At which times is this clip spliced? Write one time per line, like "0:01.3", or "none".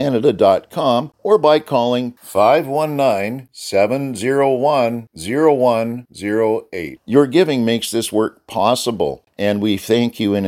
0:01.1
0:09.2